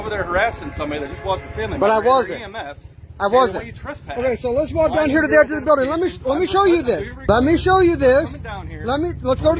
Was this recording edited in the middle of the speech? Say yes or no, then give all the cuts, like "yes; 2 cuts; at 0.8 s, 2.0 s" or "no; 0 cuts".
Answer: yes; 1 cut; at 7.2 s